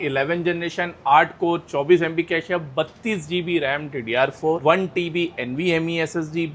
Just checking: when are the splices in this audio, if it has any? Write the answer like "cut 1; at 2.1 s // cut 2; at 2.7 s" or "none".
none